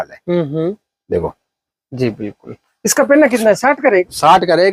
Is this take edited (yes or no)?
no